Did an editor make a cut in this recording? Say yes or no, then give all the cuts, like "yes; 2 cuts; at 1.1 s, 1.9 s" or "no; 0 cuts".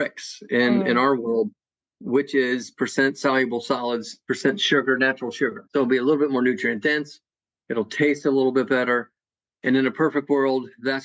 yes; 1 cut; at 5.6 s